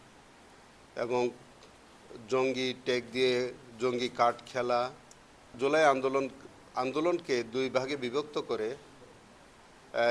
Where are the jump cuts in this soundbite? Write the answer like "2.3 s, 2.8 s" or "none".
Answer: 5.5 s

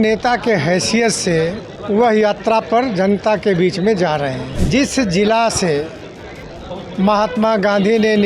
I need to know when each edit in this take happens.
1.7 s, 4.5 s

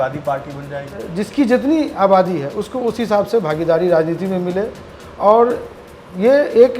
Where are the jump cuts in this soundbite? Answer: 1.0 s

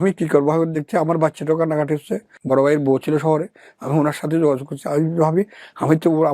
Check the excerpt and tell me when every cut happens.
2.3 s

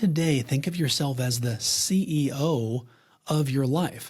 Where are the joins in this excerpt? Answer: none

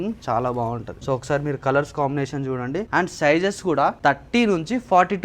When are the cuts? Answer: 0.9 s, 2.9 s, 4.0 s

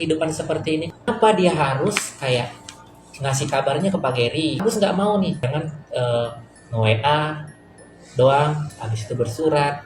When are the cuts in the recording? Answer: 1.1 s, 4.6 s, 5.5 s

